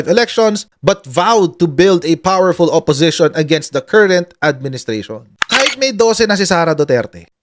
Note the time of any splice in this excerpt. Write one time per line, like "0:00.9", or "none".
0:05.6

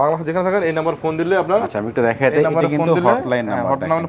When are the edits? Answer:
none

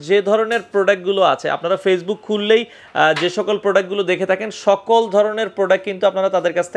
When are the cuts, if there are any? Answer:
none

